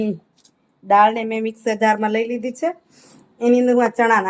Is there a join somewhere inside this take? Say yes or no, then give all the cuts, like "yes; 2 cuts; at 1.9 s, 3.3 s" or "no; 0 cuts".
no; 0 cuts